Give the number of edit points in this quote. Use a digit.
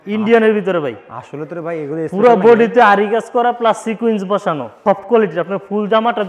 1